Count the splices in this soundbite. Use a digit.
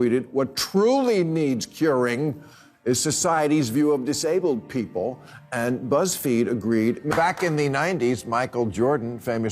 1